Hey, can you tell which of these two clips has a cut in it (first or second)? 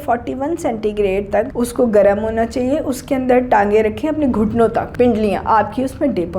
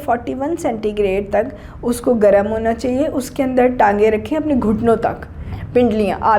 first